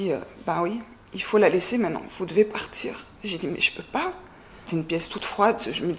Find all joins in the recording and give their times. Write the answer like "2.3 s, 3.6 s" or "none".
4.6 s